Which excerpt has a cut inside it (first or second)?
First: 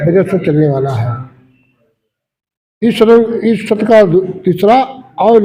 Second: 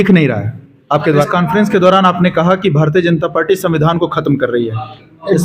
second